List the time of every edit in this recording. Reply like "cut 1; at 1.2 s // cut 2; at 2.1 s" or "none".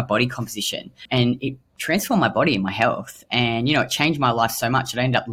cut 1; at 1.0 s